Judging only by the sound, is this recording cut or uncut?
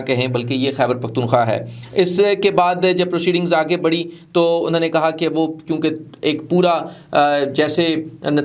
uncut